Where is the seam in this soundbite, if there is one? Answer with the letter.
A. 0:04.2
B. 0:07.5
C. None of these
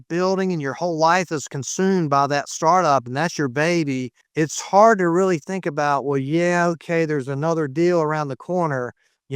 A